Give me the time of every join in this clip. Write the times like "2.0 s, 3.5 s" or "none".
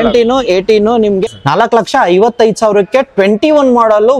1.2 s